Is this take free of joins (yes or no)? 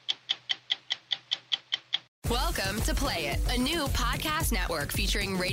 no